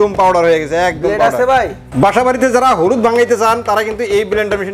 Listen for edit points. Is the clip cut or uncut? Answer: cut